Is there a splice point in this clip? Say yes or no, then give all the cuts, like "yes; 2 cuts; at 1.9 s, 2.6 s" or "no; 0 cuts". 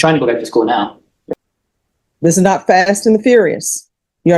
yes; 1 cut; at 1.3 s